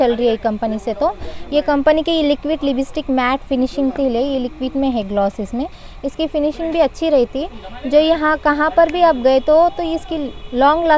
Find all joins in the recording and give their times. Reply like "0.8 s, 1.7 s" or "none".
none